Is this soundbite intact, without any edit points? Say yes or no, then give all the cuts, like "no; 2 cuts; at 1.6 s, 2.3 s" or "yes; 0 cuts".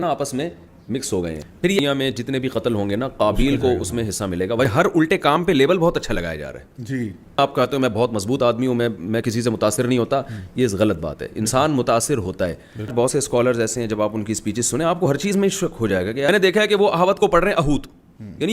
no; 5 cuts; at 1.8 s, 4.7 s, 7.4 s, 12.9 s, 16.3 s